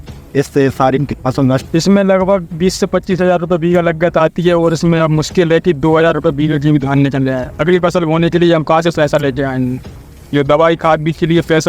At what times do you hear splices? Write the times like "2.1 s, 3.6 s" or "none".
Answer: 1.6 s